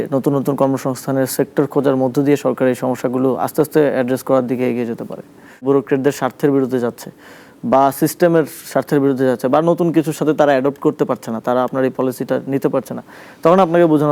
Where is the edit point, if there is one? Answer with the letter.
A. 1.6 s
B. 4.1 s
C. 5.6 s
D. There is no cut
C